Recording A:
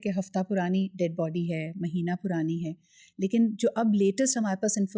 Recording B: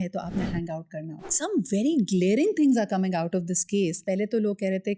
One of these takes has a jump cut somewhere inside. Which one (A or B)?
B